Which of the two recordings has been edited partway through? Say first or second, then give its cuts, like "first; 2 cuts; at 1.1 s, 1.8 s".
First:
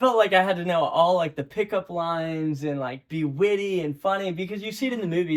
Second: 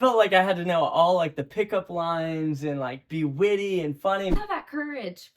second; 1 cut; at 4.4 s